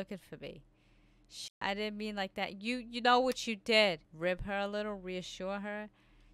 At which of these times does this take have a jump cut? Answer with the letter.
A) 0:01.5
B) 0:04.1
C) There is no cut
B